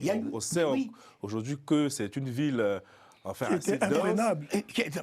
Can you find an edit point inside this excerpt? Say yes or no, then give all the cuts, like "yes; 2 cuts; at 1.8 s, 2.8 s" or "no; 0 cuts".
no; 0 cuts